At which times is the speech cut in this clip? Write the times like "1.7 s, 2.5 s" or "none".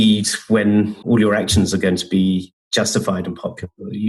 1.0 s

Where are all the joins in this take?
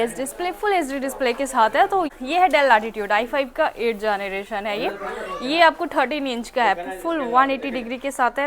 2.1 s

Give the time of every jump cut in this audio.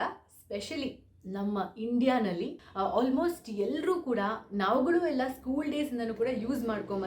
2.6 s

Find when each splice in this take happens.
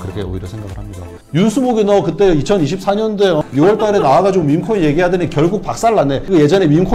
1.2 s

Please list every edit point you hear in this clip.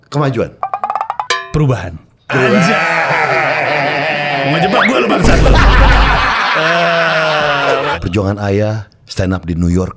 7.9 s

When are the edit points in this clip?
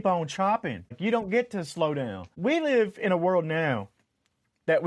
1.0 s, 2.2 s

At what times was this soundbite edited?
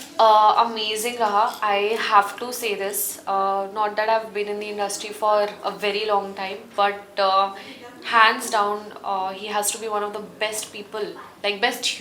none

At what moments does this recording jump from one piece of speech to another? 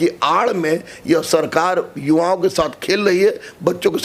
none

